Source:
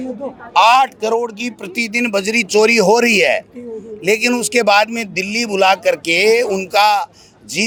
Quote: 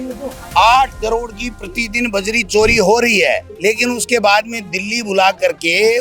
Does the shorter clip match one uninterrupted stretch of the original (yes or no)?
no